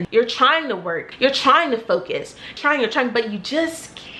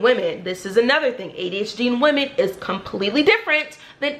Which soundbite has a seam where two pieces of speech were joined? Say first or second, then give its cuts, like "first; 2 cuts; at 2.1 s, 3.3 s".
first; 2 cuts; at 1.1 s, 2.5 s